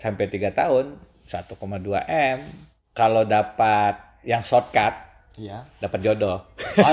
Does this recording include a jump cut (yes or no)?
yes